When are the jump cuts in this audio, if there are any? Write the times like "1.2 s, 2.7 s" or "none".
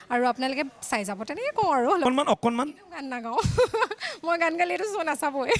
2.0 s